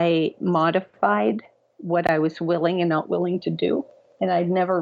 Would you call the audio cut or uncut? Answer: uncut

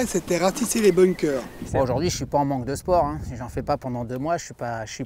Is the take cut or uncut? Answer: cut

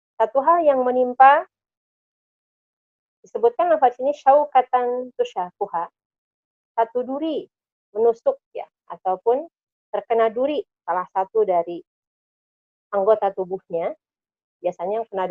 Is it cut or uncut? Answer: uncut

